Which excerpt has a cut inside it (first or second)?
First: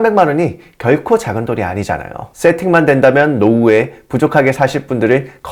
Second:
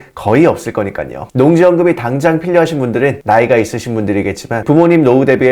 second